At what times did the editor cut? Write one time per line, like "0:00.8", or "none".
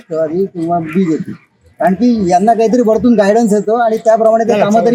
none